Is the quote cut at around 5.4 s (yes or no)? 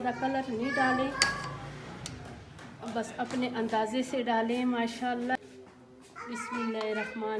yes